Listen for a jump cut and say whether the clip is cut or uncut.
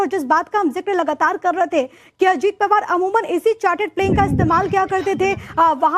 cut